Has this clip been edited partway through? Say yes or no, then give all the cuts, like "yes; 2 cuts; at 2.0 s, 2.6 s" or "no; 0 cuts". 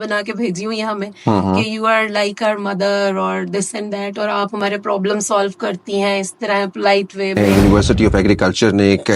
yes; 1 cut; at 7.4 s